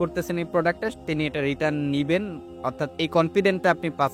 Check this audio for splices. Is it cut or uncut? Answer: uncut